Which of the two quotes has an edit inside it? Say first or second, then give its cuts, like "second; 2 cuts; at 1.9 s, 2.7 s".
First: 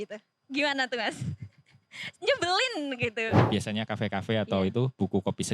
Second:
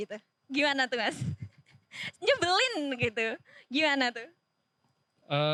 first; 1 cut; at 3.4 s